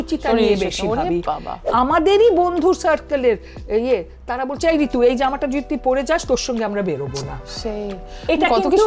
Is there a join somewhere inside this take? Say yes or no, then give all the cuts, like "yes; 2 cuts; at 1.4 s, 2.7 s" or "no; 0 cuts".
yes; 1 cut; at 1.7 s